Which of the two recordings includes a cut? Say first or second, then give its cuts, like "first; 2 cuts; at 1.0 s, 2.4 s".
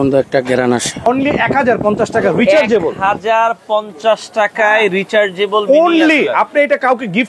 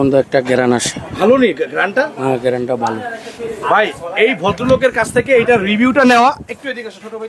first; 1 cut; at 1.0 s